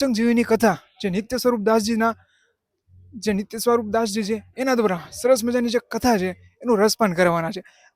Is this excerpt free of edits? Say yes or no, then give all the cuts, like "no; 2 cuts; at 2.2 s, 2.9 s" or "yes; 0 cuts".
yes; 0 cuts